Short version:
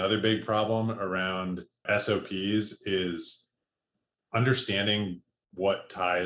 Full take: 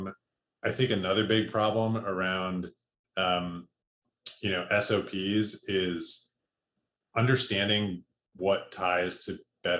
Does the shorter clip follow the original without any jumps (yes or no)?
no